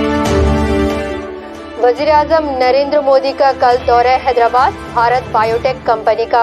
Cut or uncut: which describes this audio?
cut